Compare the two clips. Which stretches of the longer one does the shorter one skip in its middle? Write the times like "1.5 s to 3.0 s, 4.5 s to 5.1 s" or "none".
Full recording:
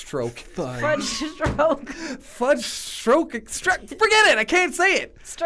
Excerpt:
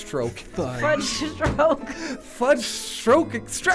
none